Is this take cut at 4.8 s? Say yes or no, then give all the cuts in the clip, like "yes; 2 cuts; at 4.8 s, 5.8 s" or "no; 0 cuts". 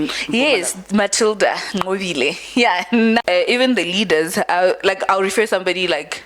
no; 1 cut; at 3.2 s